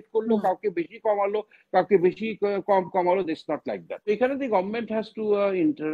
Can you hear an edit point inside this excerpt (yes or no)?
yes